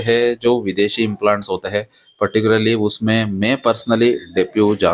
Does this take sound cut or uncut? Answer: uncut